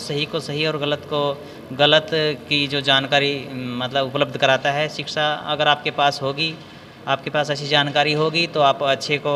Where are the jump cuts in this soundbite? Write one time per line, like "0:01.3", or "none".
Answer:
none